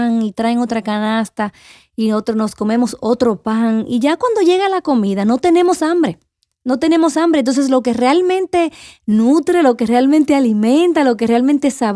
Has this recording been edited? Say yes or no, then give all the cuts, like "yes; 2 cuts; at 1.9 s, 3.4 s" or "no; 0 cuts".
no; 0 cuts